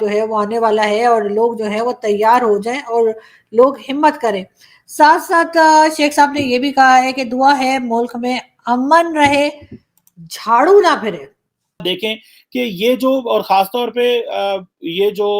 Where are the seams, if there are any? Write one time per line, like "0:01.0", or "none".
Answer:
0:11.8